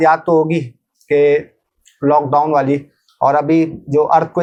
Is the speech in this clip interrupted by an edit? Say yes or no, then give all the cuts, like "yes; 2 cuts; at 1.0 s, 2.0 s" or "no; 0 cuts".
no; 0 cuts